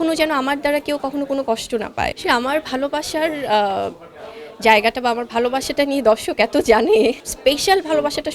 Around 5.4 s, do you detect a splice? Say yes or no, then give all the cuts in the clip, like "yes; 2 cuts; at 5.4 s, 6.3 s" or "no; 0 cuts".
no; 2 cuts; at 2.2 s, 7.3 s